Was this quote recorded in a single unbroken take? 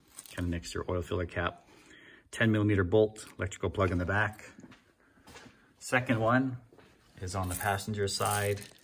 no; 1 cut; at 4.9 s

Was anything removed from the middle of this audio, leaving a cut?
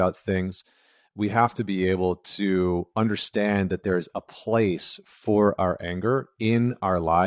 no; 0 cuts

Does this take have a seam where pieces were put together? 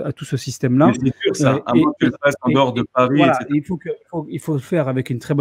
no; 0 cuts

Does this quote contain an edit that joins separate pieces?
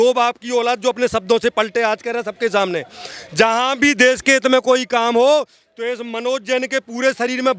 no; 0 cuts

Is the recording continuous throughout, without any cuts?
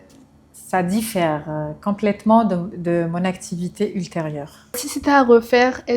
no; 1 cut; at 4.9 s

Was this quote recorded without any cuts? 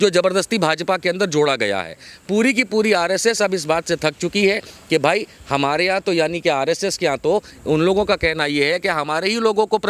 yes; 0 cuts

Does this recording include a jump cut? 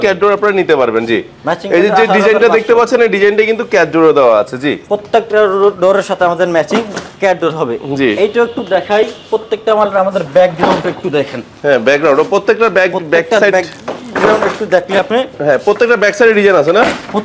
no; 0 cuts

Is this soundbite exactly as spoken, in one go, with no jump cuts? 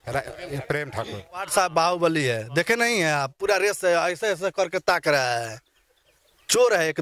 no; 1 cut; at 1.5 s

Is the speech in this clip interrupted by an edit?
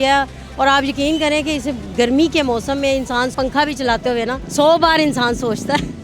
yes; 2 cuts; at 3.3 s, 4.4 s

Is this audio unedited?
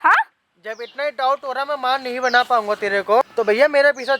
no; 1 cut; at 3.2 s

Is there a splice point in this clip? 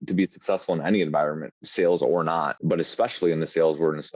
yes; 1 cut; at 2.6 s

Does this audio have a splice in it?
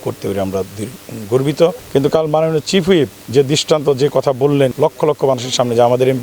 yes; 2 cuts; at 1.8 s, 4.7 s

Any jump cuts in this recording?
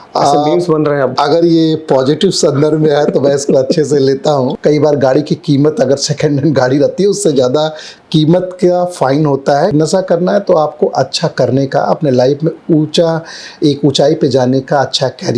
yes; 2 cuts; at 4.5 s, 9.7 s

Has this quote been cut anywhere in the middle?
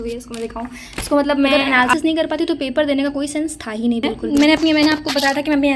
yes; 2 cuts; at 1.5 s, 4.2 s

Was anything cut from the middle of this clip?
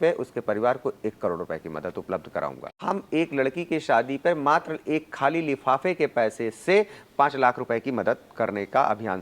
yes; 1 cut; at 2.7 s

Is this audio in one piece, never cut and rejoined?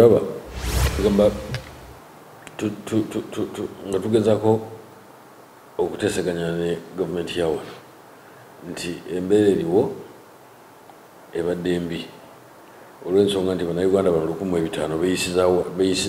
no; 1 cut; at 1.0 s

